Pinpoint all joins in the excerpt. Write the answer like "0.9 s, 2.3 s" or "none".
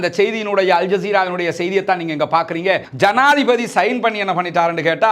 2.9 s